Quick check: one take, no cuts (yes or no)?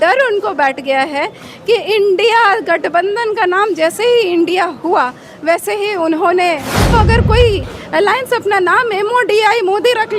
no